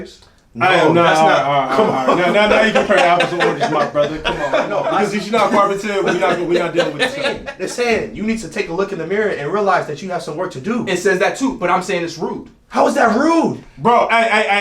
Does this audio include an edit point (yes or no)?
yes